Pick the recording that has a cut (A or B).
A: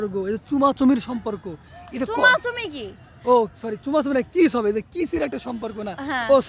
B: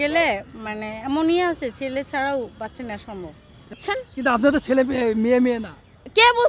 B